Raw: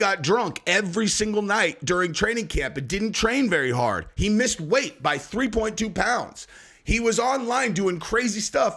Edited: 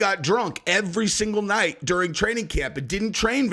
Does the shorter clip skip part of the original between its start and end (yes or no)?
no